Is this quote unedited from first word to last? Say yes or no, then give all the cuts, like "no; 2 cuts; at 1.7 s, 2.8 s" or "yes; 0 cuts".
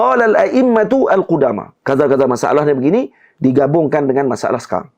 yes; 0 cuts